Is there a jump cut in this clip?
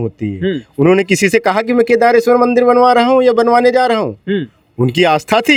no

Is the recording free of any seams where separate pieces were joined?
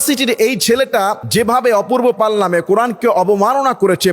no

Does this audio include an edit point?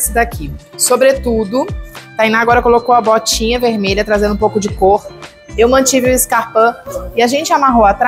no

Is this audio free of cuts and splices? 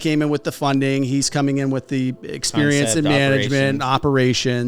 yes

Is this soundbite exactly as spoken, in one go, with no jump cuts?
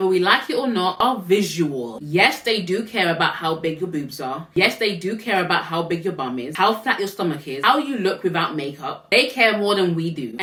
yes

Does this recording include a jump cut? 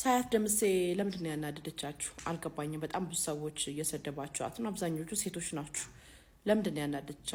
no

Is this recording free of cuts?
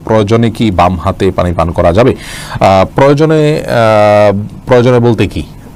yes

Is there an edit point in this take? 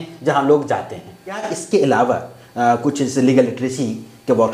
yes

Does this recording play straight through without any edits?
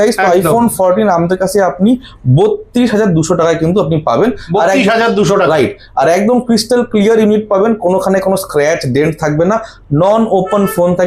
yes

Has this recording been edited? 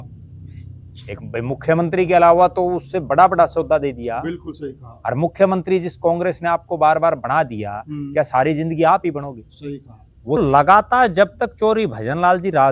yes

